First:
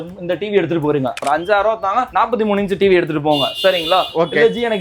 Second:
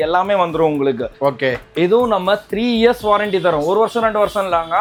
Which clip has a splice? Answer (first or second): first